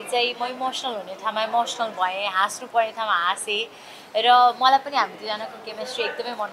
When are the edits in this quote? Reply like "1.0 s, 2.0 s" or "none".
none